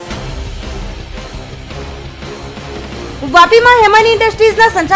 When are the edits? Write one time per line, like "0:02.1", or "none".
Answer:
0:03.2